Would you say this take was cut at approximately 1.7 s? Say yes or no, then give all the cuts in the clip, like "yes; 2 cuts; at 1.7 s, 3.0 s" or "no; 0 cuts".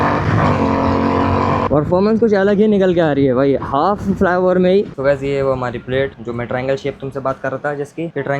yes; 2 cuts; at 1.7 s, 4.9 s